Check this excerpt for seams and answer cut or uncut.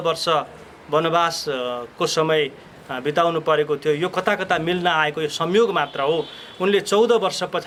uncut